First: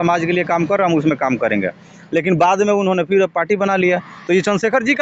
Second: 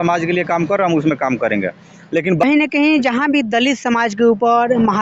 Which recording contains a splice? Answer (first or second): second